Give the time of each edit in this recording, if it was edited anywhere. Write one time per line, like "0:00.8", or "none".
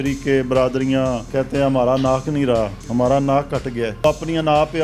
0:01.3
0:02.8
0:04.0